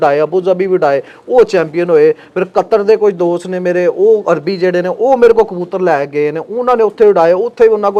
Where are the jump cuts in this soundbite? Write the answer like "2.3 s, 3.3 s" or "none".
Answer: none